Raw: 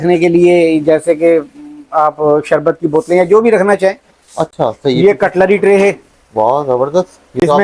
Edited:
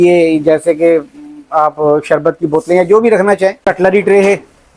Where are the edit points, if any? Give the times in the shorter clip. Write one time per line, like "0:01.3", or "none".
0:03.6